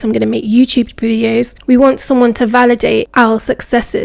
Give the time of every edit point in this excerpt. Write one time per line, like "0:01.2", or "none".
0:01.6
0:03.1